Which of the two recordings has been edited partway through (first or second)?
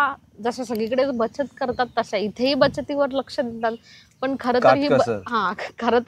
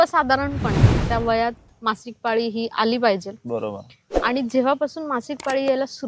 second